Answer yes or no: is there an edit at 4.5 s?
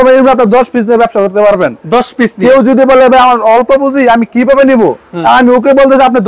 no